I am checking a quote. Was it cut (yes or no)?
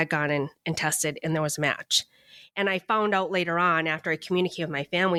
no